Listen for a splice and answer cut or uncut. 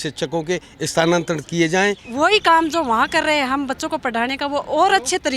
cut